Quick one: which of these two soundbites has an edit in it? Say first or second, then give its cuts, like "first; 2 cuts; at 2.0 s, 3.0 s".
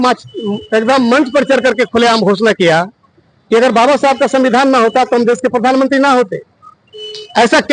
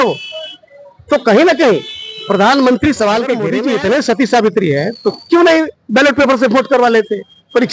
second; 1 cut; at 3.5 s